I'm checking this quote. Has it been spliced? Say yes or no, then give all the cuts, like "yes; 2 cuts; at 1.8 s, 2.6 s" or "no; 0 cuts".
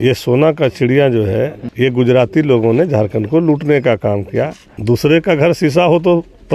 yes; 2 cuts; at 1.6 s, 4.7 s